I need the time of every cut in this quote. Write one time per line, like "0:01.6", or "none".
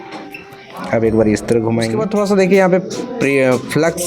0:02.0

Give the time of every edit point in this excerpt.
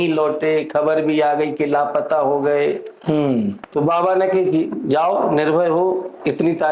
0:03.6

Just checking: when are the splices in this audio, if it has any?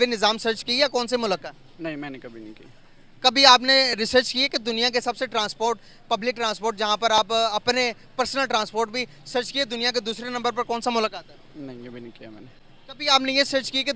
none

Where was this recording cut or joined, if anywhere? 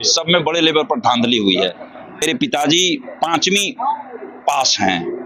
0:02.2

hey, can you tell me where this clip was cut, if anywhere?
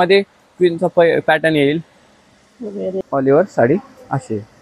0:03.0

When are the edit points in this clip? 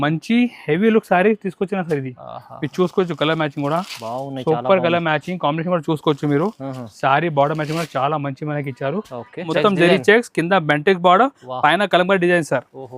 0:09.5

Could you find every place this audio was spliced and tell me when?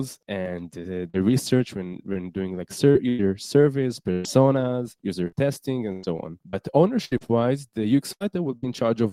none

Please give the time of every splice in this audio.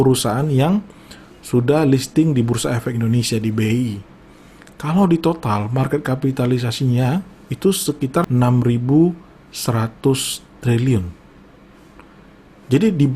0:08.3

